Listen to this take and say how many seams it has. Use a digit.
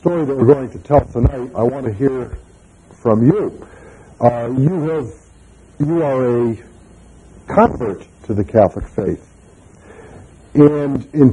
1